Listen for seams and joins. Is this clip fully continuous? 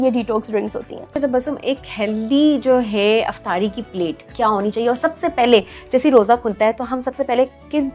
no; 2 cuts; at 1.0 s, 4.3 s

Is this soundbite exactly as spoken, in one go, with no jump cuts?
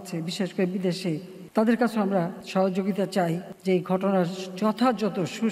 no; 3 cuts; at 1.3 s, 2.4 s, 3.5 s

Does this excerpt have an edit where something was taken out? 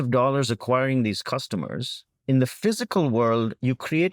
no; 0 cuts

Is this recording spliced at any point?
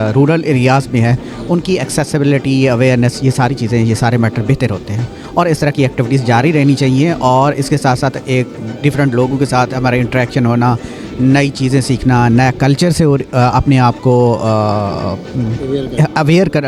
no; 0 cuts

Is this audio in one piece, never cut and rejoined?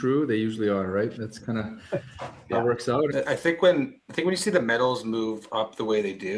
no; 1 cut; at 3.1 s

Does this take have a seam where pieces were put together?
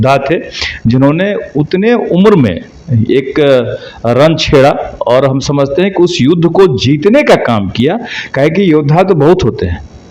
no; 0 cuts

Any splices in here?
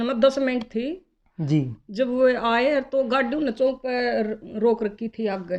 no; 0 cuts

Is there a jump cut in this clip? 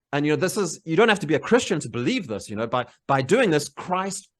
no; 0 cuts

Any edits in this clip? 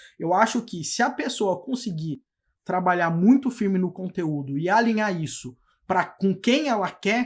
no; 0 cuts

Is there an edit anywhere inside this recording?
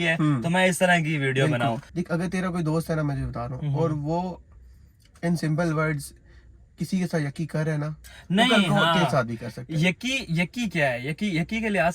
yes; 1 cut; at 1.8 s

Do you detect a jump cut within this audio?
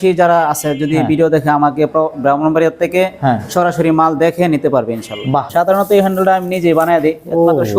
yes; 1 cut; at 5.5 s

